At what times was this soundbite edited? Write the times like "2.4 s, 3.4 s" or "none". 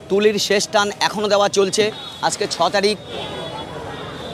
3.1 s